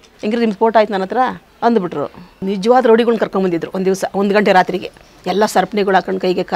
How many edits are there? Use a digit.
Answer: 2